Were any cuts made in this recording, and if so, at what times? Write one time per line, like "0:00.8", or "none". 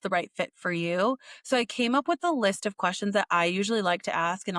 none